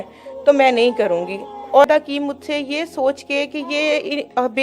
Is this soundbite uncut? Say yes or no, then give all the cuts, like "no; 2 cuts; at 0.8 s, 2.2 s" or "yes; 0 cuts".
no; 1 cut; at 1.8 s